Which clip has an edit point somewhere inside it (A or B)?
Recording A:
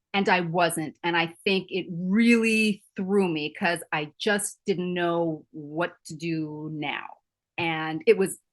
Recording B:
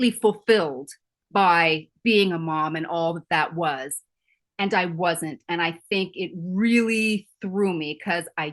A